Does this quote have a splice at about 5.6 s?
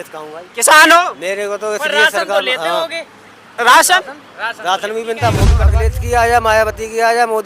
yes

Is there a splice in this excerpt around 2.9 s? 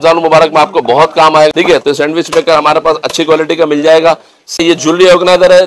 no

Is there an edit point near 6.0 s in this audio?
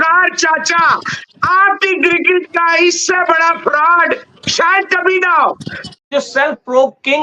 yes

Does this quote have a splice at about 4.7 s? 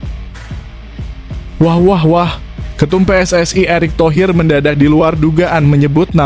no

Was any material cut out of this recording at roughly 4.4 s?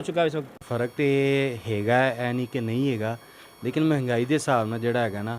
no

